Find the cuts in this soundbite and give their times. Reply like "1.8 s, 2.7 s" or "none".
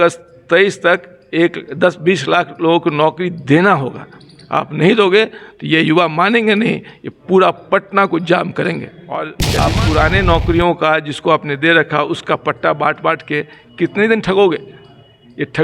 9.4 s